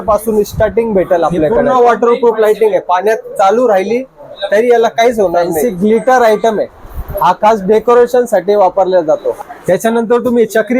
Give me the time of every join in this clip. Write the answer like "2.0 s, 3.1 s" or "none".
1.6 s, 5.6 s, 9.5 s

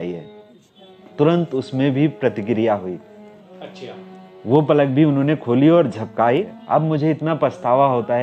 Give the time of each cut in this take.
6.6 s

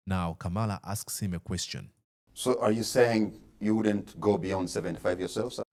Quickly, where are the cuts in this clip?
none

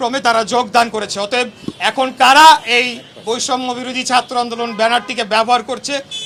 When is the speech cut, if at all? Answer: none

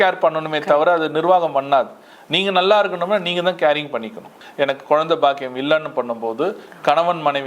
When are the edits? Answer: 4.4 s

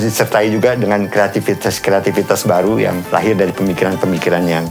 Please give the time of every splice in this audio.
3.0 s

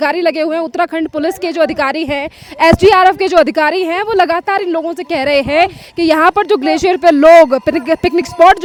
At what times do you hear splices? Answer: none

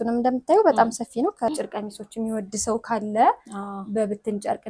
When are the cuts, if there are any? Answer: 1.5 s

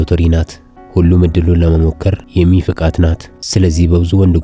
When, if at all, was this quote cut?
3.4 s

